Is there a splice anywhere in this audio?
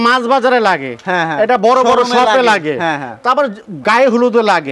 no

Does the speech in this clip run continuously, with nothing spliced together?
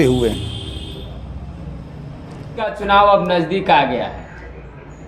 no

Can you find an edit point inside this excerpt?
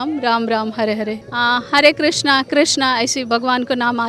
yes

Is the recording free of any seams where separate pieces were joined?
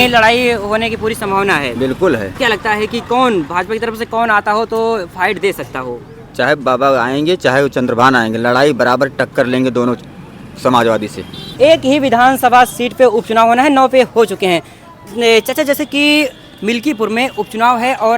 no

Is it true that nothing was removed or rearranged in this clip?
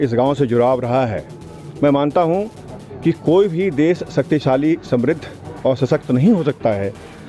yes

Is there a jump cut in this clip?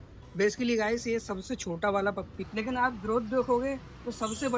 yes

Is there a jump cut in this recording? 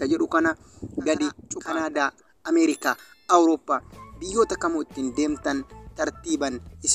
yes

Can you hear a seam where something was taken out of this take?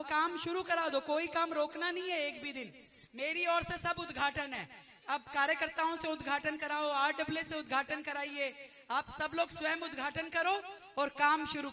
no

